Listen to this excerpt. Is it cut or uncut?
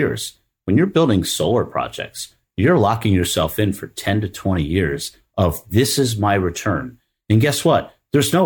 uncut